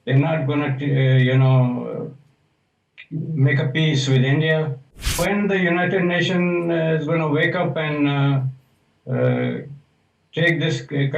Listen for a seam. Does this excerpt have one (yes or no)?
yes